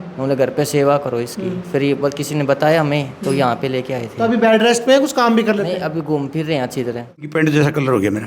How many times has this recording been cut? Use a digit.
1